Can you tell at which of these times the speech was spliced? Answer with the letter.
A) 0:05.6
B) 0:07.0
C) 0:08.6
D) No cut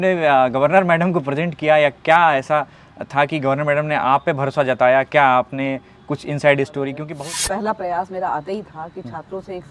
B